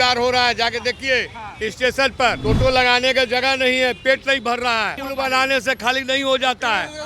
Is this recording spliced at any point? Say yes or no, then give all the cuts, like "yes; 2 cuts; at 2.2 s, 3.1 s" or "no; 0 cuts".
yes; 2 cuts; at 2.4 s, 5.0 s